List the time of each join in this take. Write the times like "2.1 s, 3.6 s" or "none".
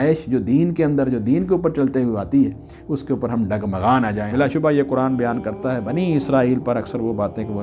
4.2 s